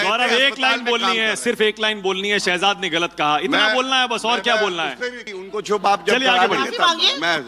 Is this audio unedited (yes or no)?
no